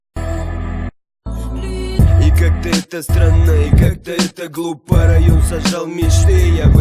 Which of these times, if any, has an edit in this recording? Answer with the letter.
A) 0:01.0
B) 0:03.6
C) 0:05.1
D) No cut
A